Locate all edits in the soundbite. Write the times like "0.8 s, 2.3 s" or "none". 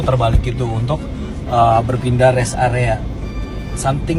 none